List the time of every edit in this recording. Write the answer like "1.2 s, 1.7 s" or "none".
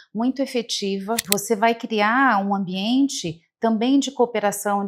1.3 s